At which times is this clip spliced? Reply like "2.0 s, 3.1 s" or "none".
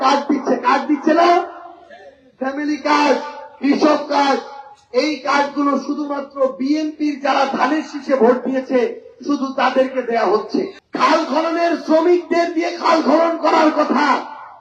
10.8 s